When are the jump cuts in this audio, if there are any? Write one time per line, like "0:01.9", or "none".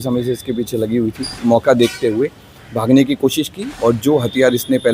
0:01.3
0:03.6